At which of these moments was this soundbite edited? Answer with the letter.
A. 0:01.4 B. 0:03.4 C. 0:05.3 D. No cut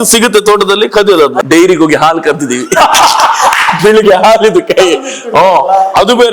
A